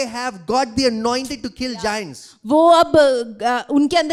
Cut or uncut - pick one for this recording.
uncut